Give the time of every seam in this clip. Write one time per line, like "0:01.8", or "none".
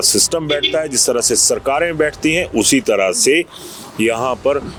none

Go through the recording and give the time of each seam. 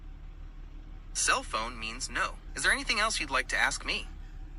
0:02.5

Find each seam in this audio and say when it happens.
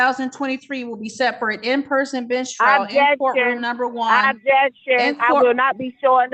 none

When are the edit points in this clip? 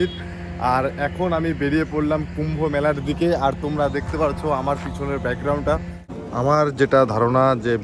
0:06.1

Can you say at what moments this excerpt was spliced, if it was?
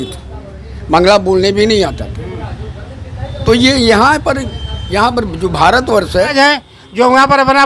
0:06.3

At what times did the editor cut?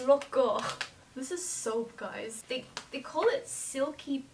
0:02.4

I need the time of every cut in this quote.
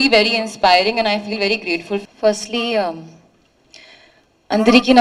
0:02.0

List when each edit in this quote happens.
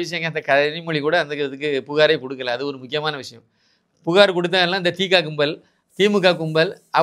none

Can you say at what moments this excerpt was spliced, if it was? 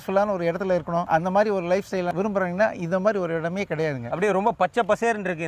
0:01.1
0:02.1
0:04.1

